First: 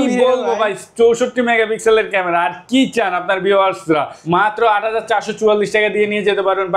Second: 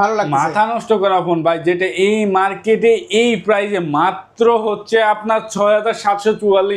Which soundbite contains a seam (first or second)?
first